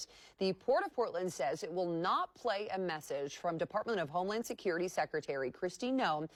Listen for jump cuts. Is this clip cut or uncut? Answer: uncut